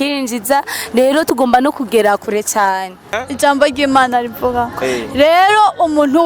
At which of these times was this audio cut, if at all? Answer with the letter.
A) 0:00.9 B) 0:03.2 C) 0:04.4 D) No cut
B